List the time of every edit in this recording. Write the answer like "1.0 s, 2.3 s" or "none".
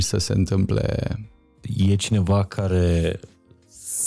1.6 s